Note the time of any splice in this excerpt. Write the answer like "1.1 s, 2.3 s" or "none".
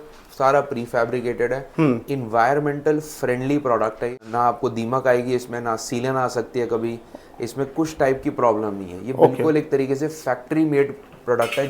4.2 s

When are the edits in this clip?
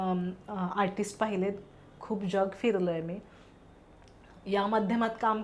none

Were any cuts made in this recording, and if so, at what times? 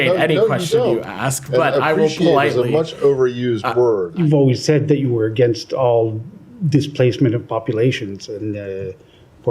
4.1 s

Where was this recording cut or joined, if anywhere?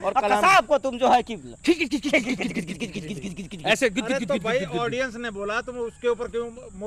none

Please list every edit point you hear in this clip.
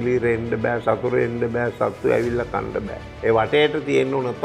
3.0 s

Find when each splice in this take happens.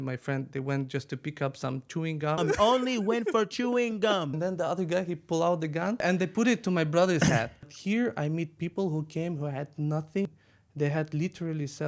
2.4 s, 4.3 s, 6.0 s, 7.7 s, 10.3 s

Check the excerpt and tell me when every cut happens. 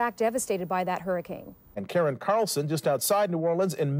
2.1 s

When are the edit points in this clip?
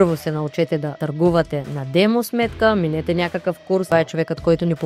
1.0 s, 3.9 s

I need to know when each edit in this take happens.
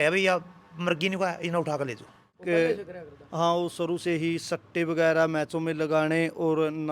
2.4 s

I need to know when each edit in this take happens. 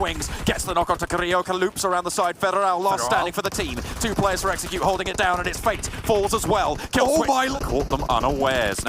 7.5 s

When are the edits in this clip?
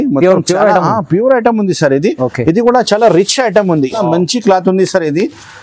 4.0 s

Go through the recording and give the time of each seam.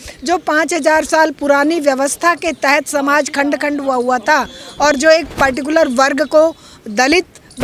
none

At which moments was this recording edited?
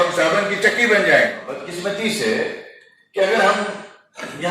1.7 s

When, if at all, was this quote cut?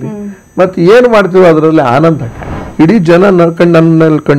2.6 s

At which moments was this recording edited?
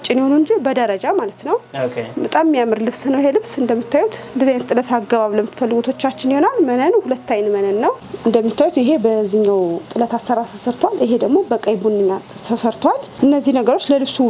8.1 s, 13.1 s

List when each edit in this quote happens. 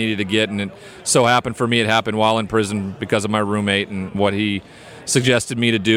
4.1 s

